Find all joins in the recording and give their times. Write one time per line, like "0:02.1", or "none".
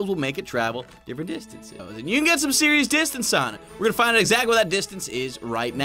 0:01.8